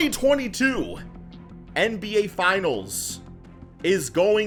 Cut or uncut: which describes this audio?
uncut